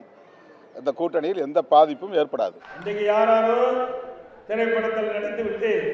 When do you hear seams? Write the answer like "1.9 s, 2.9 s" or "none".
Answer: 2.8 s